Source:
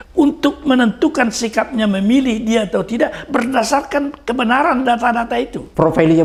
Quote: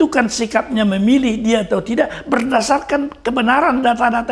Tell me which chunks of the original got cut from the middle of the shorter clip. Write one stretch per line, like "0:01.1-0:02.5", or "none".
none